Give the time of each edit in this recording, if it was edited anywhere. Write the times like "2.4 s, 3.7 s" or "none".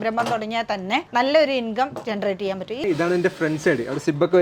1.1 s, 2.8 s